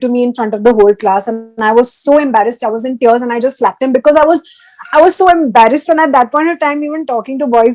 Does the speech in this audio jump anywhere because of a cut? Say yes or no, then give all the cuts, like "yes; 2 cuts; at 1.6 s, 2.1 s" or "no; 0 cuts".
no; 0 cuts